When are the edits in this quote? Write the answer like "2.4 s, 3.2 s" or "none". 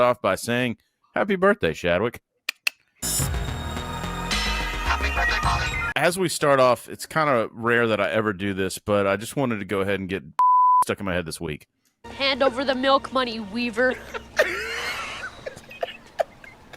5.8 s